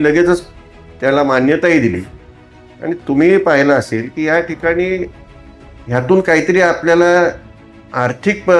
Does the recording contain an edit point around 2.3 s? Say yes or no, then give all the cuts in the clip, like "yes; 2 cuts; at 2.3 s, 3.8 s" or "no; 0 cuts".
no; 0 cuts